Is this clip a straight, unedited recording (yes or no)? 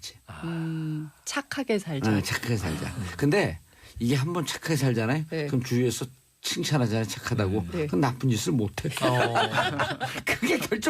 no